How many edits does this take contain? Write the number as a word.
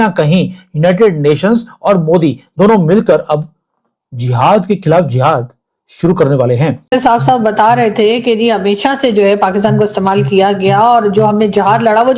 one